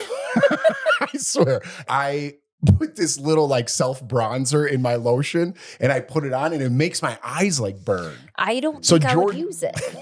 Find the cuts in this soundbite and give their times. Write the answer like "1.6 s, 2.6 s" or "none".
1.8 s